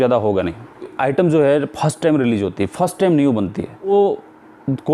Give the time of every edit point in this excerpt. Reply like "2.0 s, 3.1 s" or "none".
0.9 s, 3.9 s